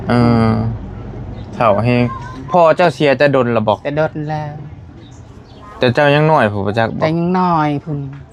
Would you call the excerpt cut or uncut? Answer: uncut